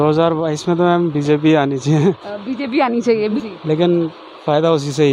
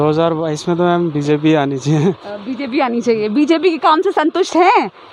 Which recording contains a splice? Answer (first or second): first